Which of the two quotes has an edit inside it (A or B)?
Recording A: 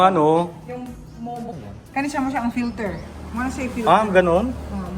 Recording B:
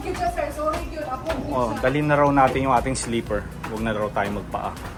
A